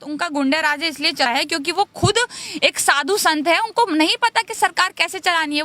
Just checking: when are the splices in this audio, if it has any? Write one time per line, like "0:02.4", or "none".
0:01.3